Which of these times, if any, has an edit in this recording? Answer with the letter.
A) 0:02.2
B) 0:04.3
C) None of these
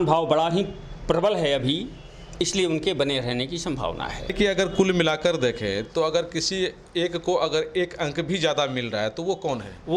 B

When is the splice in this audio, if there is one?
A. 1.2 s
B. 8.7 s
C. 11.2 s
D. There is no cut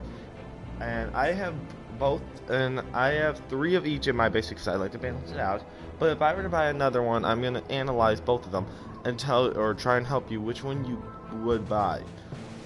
C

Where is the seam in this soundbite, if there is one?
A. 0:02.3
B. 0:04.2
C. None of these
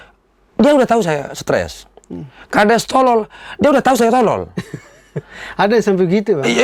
C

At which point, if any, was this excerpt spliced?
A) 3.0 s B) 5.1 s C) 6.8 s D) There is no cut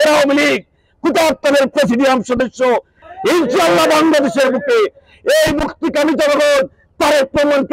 A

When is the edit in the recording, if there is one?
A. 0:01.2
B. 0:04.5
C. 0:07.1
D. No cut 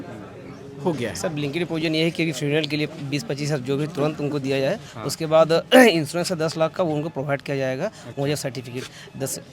A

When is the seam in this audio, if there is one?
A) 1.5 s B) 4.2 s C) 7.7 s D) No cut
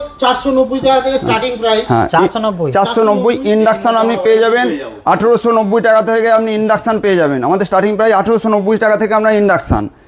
D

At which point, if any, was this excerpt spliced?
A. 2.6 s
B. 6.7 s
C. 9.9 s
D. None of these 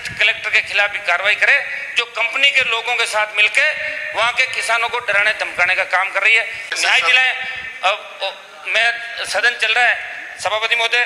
B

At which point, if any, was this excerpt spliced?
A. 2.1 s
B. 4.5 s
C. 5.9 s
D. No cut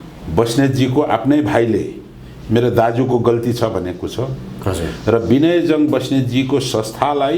D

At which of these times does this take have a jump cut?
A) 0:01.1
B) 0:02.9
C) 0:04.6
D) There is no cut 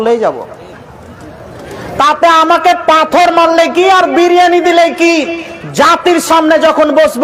D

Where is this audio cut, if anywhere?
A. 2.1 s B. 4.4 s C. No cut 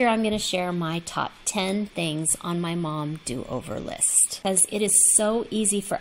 B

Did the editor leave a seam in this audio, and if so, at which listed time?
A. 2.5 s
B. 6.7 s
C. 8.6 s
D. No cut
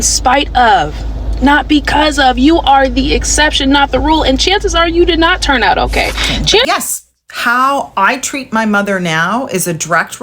B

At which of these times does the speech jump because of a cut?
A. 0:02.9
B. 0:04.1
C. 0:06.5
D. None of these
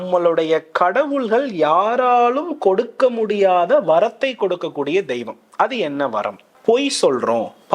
C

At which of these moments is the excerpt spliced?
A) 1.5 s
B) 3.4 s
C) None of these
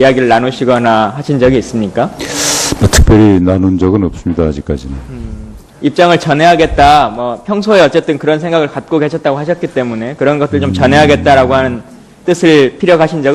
C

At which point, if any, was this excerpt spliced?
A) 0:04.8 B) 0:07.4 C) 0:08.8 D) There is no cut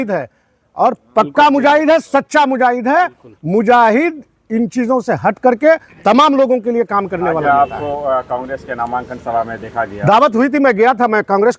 B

